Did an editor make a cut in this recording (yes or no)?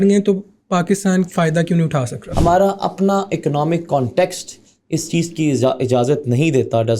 yes